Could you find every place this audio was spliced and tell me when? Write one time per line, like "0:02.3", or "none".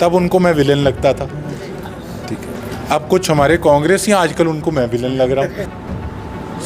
0:05.6